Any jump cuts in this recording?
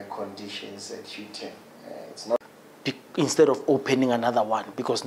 yes; 1 cut; at 2.4 s

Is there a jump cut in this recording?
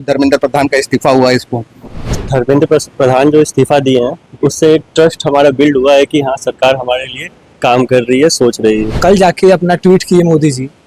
yes; 1 cut; at 8.9 s

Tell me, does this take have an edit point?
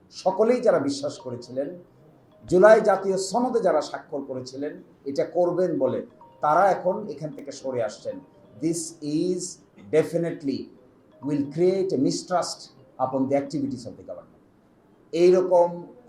no; 0 cuts

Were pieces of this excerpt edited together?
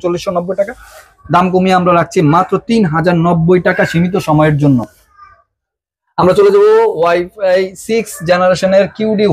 no; 0 cuts

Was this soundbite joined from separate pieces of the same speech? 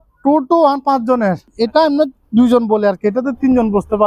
yes; 1 cut; at 1.5 s

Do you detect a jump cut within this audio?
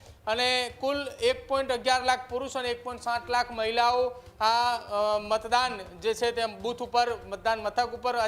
no; 0 cuts

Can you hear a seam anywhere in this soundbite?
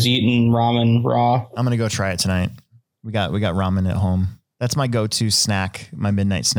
yes; 1 cut; at 4.4 s

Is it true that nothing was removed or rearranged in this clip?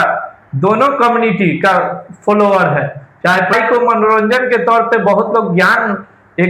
no; 1 cut; at 3.5 s

